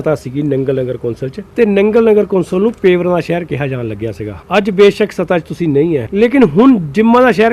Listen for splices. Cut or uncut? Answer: cut